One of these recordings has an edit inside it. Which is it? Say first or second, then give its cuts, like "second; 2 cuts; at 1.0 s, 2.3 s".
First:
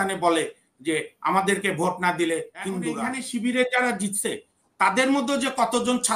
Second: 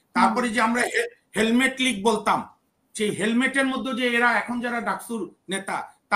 first; 1 cut; at 3.1 s